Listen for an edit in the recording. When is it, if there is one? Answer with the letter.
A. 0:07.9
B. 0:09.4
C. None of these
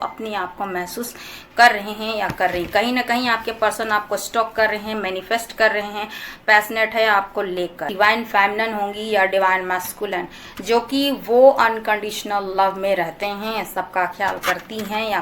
A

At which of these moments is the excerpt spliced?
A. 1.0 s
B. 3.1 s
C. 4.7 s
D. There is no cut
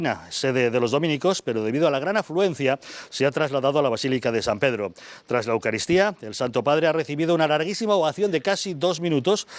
A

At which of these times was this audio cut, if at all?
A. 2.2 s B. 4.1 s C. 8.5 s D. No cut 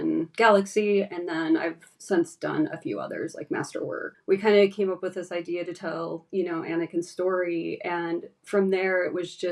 B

